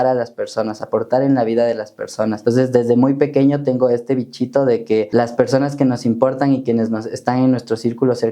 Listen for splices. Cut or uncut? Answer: cut